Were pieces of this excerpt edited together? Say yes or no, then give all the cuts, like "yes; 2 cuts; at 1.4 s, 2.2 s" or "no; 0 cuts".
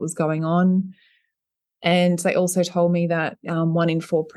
no; 0 cuts